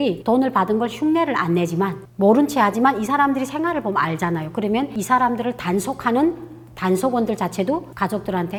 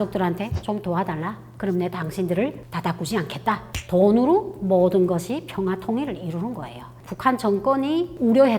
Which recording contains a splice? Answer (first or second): second